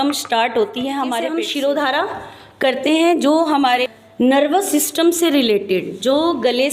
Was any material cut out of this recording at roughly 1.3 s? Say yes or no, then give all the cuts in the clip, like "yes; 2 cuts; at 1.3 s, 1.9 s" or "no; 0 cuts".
yes; 2 cuts; at 1.3 s, 3.8 s